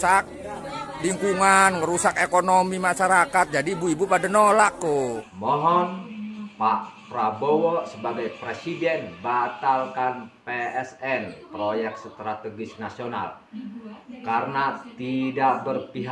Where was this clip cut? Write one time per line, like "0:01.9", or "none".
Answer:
0:05.3